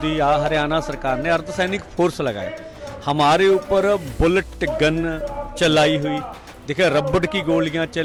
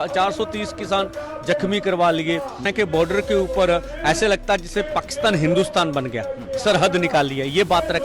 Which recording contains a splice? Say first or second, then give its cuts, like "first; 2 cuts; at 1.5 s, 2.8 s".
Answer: second; 1 cut; at 2.7 s